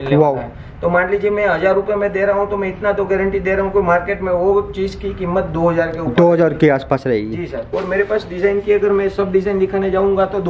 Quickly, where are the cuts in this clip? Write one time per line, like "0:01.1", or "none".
0:07.8